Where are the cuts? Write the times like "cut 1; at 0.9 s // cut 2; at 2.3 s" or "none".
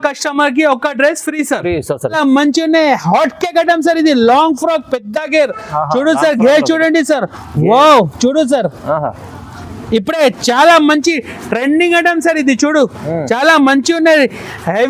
cut 1; at 2.2 s